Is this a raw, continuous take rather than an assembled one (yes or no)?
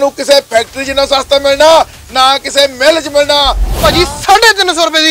no